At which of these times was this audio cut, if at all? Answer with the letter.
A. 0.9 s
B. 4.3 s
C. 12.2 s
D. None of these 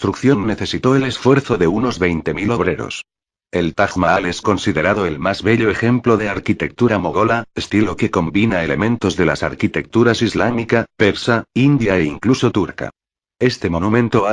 D